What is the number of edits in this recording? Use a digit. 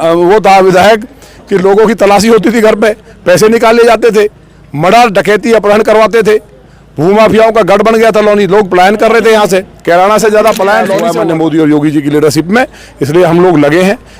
1